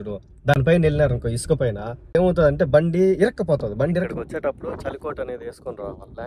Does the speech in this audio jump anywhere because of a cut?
yes; 2 cuts; at 1.9 s, 4.1 s

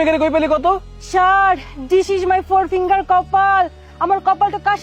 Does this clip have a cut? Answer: no; 0 cuts

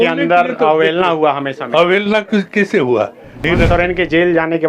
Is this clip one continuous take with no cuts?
no; 1 cut; at 3.4 s

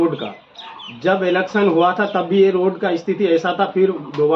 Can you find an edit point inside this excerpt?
no; 0 cuts

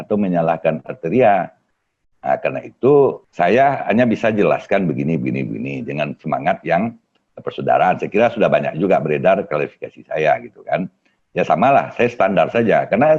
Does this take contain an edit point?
yes; 1 cut; at 3.2 s

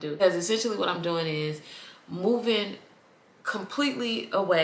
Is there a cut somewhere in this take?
no; 0 cuts

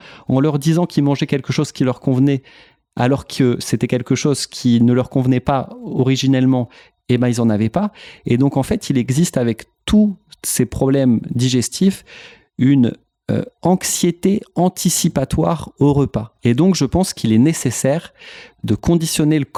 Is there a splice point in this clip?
no; 0 cuts

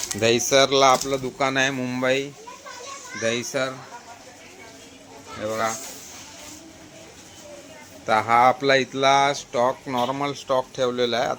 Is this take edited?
no; 0 cuts

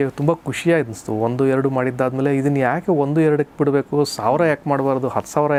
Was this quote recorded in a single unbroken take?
yes; 0 cuts

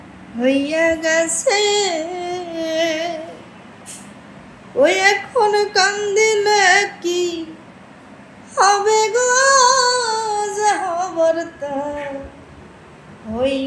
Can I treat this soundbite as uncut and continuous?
yes; 0 cuts

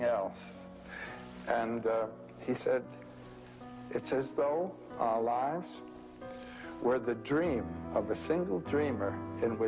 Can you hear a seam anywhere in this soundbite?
yes; 1 cut; at 1.6 s

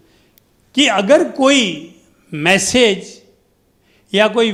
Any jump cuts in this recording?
no; 0 cuts

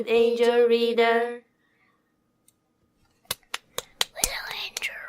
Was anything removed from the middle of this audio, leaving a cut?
yes; 1 cut; at 4.1 s

